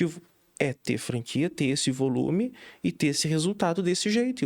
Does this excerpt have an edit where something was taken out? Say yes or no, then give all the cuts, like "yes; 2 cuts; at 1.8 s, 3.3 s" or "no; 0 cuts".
no; 0 cuts